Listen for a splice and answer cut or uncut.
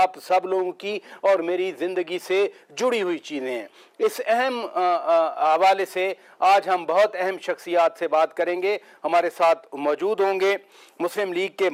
uncut